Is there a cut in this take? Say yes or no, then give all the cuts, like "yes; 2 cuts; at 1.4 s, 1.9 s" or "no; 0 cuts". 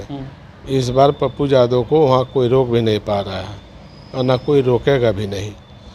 no; 0 cuts